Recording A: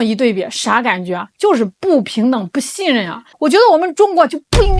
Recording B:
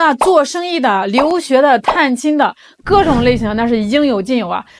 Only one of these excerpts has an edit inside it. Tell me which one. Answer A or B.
A